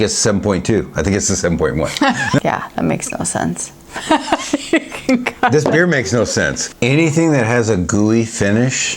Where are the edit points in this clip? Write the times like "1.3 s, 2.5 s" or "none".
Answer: 2.4 s, 6.6 s